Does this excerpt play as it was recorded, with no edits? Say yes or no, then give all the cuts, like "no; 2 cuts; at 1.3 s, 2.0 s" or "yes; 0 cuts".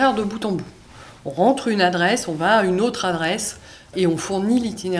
no; 1 cut; at 3.9 s